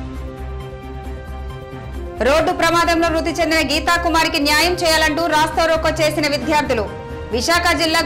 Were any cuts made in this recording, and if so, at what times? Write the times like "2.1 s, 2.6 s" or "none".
1.2 s